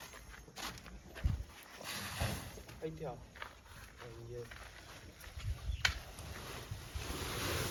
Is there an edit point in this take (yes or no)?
no